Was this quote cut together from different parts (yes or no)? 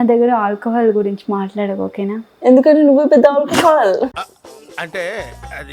no